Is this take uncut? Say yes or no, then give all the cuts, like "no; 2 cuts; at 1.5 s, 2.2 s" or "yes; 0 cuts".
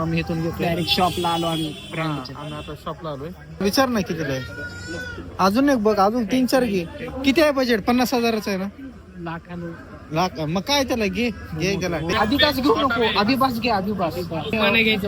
yes; 0 cuts